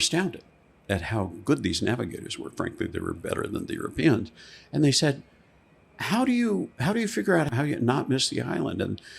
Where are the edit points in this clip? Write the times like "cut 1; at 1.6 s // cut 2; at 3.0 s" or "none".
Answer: cut 1; at 7.5 s